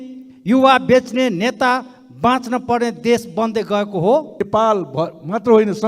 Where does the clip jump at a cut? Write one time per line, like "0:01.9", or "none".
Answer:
0:04.4